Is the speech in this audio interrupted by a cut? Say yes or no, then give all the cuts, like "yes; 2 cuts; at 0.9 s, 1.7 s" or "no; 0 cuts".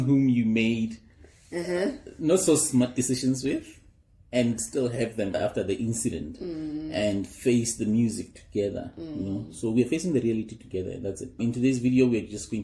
yes; 1 cut; at 11.4 s